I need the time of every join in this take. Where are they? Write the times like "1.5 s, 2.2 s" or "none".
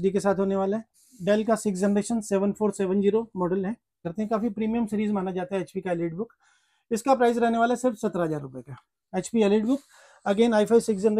1.0 s, 4.0 s